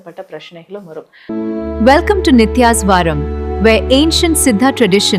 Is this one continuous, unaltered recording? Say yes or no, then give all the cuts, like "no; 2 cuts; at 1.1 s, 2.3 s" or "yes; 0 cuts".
no; 1 cut; at 1.1 s